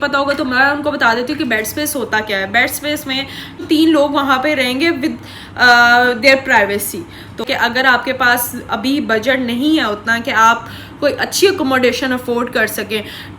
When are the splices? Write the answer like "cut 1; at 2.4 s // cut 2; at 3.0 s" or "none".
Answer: cut 1; at 3.6 s // cut 2; at 7.4 s